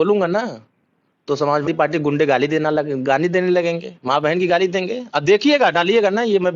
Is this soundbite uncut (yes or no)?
no